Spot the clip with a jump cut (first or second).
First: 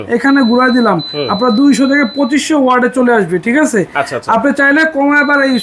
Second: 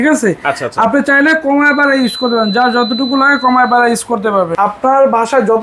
second